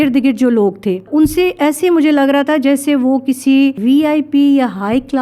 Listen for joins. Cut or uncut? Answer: cut